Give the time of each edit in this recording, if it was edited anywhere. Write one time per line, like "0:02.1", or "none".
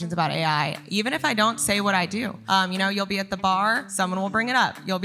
0:02.4
0:03.9